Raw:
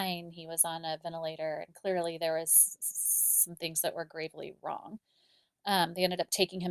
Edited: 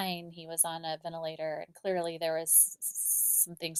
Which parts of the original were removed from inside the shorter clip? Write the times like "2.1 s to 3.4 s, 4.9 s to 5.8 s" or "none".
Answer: none